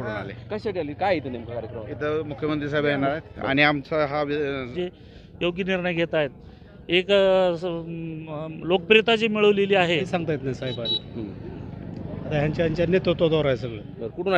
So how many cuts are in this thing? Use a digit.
2